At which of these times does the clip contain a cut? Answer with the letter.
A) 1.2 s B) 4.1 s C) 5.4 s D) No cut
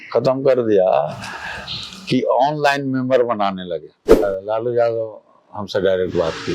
B